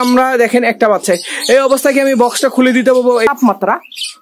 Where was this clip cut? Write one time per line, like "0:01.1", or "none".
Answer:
0:03.3